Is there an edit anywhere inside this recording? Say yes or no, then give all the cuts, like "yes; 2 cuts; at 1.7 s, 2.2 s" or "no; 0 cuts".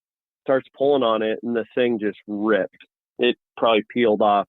yes; 1 cut; at 3.0 s